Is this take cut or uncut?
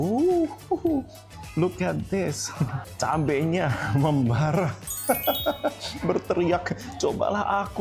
uncut